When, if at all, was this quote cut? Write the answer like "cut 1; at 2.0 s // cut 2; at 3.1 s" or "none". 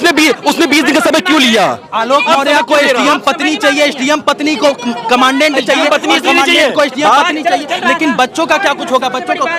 none